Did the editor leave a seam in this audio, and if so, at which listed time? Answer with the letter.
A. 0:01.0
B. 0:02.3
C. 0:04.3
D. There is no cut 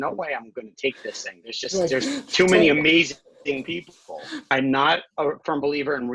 C